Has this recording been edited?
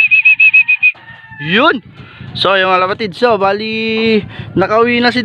no; 0 cuts

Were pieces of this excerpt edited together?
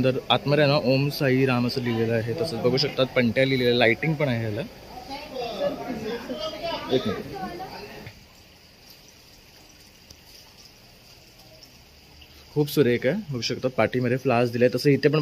yes; 1 cut; at 8.1 s

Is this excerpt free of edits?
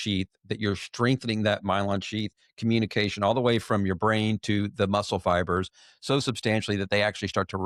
yes; 0 cuts

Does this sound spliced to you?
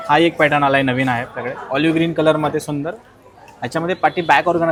no; 0 cuts

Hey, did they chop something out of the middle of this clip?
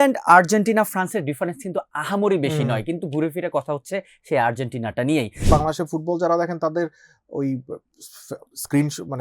yes; 1 cut; at 5.5 s

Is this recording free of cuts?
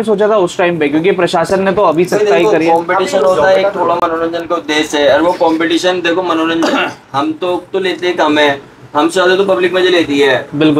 yes; 0 cuts

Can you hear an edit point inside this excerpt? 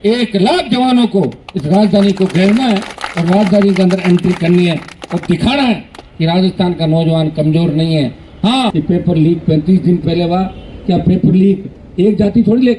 yes; 1 cut; at 8.7 s

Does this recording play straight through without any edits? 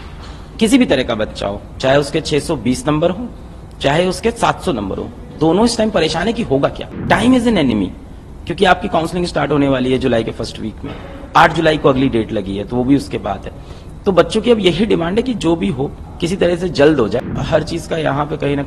no; 2 cuts; at 6.9 s, 17.2 s

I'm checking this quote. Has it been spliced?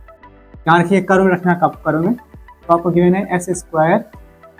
no; 0 cuts

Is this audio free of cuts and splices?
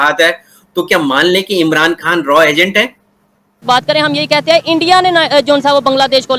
no; 1 cut; at 3.6 s

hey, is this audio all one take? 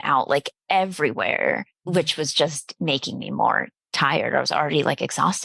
no; 1 cut; at 1.7 s

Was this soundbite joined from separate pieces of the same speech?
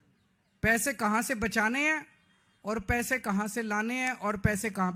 no; 0 cuts

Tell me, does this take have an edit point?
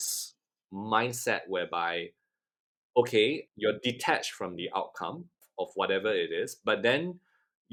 no; 0 cuts

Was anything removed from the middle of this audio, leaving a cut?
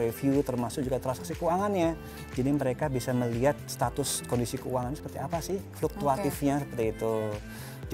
yes; 1 cut; at 2.1 s

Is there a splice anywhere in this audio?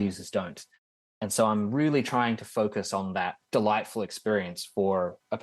yes; 1 cut; at 3.4 s

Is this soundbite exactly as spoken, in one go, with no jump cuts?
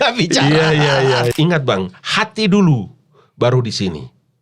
no; 1 cut; at 1.3 s

